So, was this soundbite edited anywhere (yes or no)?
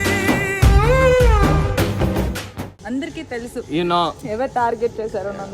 yes